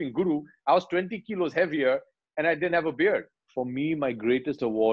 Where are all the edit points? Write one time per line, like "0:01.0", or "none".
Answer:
0:03.4